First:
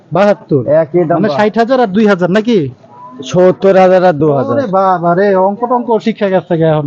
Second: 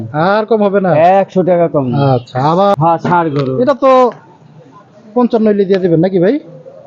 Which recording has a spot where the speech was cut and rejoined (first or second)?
second